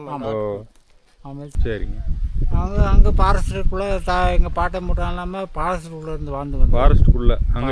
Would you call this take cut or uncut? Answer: cut